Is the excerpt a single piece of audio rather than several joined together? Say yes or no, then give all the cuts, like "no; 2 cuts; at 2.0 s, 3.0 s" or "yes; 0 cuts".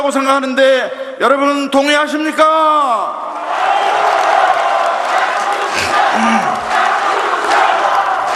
yes; 0 cuts